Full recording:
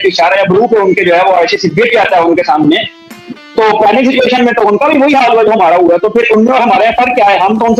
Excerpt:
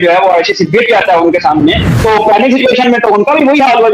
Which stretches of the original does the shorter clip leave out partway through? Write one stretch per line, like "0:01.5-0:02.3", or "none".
0:02.9-0:03.4